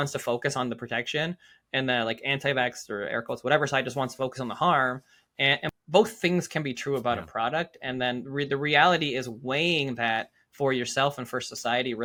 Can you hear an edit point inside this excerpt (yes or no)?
no